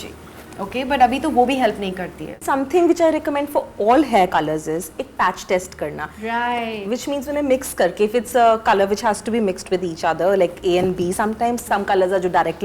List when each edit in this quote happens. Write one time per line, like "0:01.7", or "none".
0:02.4